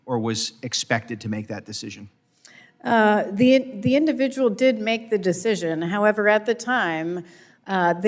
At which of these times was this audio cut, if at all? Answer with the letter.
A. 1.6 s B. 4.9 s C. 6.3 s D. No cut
D